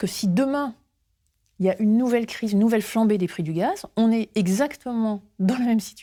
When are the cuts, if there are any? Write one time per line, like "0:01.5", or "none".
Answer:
none